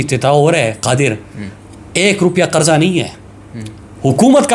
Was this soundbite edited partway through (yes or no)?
no